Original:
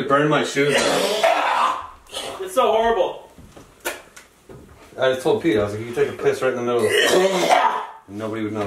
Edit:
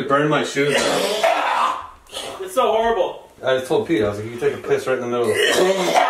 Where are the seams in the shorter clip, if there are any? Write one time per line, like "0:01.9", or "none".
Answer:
0:03.3